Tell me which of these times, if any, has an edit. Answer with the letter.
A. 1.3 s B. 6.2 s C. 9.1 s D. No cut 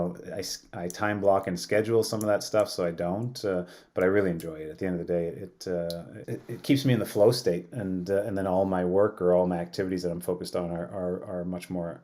B